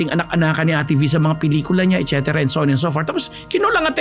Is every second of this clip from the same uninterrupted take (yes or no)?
yes